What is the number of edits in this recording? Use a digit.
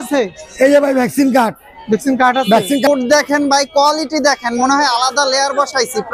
1